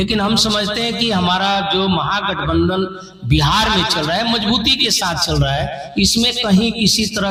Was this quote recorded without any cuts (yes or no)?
yes